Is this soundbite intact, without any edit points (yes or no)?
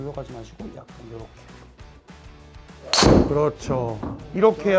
yes